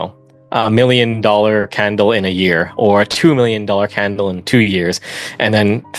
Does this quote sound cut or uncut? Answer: uncut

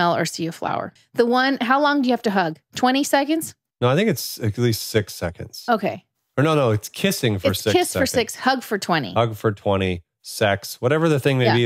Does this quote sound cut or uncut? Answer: cut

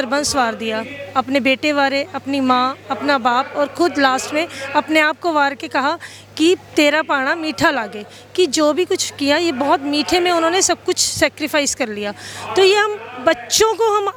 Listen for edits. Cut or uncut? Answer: uncut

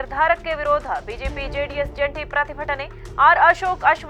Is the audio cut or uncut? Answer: uncut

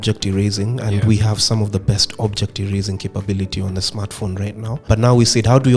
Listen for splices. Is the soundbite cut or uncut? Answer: cut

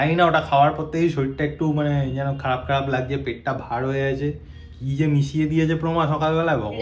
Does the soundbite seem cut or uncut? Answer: uncut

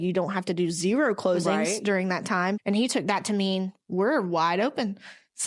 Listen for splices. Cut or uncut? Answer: cut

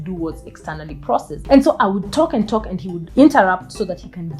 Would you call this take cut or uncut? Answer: cut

